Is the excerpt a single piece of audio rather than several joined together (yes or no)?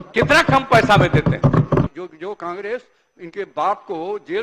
no